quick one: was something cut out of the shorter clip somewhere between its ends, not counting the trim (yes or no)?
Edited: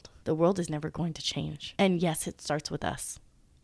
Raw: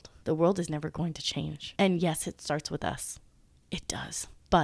no